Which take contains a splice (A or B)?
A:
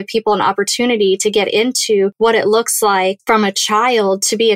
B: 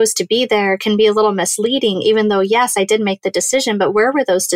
A